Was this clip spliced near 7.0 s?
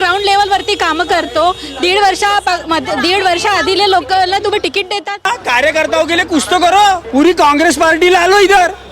yes; 2 cuts; at 5.3 s, 7.0 s

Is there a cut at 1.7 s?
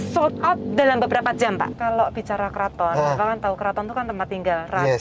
yes; 1 cut; at 1.7 s

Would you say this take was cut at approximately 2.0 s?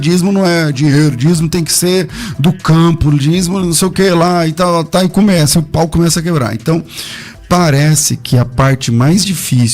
no; 0 cuts

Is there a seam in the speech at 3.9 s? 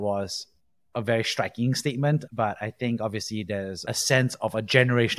yes; 2 cuts; at 2.3 s, 3.9 s

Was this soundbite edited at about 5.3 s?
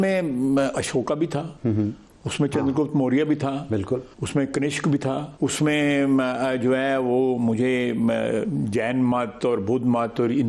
yes; 3 cuts; at 1.5 s, 4.2 s, 5.3 s

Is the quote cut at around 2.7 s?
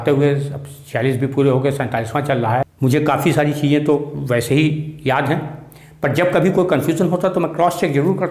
yes; 1 cut; at 2.7 s

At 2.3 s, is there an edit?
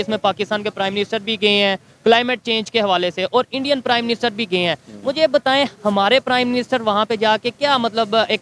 no; 0 cuts

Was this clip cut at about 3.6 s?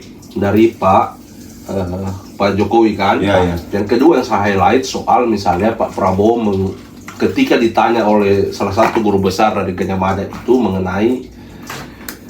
yes; 1 cut; at 3.6 s

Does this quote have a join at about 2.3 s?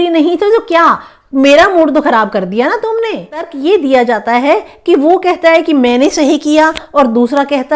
no; 1 cut; at 3.5 s

